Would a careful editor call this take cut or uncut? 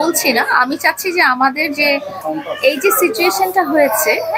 cut